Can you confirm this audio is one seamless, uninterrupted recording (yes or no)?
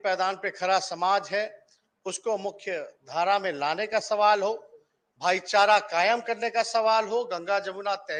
yes